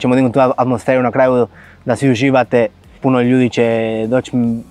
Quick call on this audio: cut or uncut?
cut